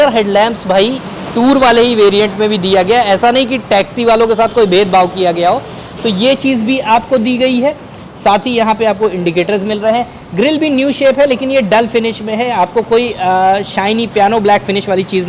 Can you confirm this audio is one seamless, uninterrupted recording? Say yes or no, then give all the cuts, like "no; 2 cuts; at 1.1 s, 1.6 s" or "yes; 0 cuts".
yes; 0 cuts